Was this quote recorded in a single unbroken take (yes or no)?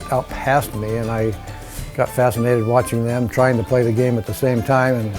yes